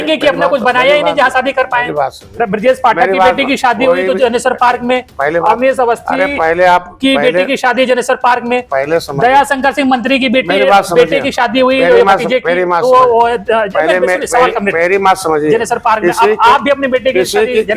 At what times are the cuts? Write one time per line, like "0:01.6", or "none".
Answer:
none